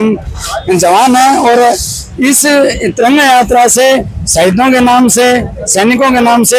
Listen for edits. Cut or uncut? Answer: uncut